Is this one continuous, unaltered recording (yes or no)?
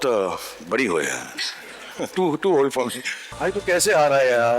no